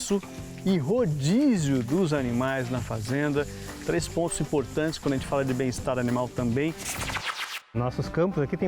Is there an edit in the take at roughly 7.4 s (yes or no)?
yes